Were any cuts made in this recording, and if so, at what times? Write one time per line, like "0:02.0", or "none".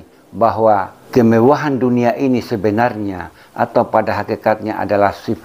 0:01.0